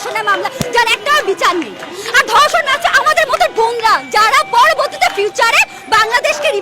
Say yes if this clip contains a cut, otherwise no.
no